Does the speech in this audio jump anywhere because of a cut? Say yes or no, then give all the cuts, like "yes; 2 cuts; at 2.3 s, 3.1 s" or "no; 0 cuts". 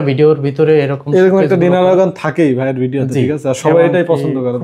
no; 0 cuts